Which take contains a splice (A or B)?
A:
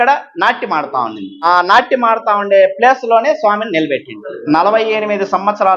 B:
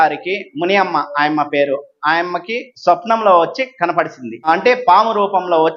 A